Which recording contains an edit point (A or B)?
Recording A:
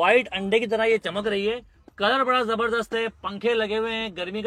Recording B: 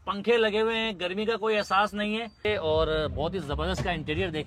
B